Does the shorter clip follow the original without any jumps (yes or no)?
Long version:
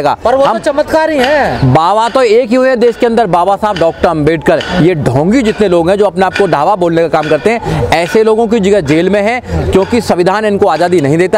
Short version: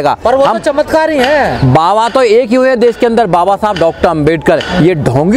yes